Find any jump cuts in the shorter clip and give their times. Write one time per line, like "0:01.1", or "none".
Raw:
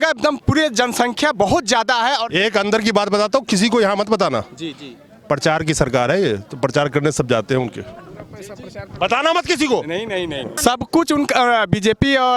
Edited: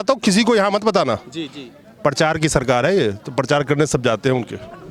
none